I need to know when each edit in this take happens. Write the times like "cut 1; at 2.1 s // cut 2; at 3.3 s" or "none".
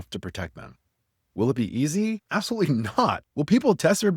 cut 1; at 2.2 s // cut 2; at 3.2 s